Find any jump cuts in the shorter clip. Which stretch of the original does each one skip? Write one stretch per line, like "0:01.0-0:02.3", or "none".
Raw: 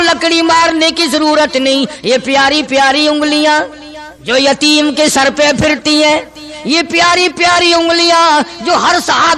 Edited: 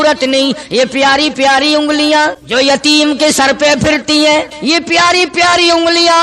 0:03.7-0:04.2
0:06.3-0:06.6